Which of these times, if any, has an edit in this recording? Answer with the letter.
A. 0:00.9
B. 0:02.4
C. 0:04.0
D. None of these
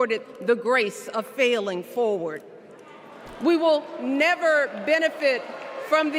B